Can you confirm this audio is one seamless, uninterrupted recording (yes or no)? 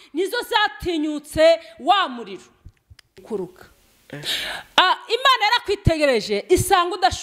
no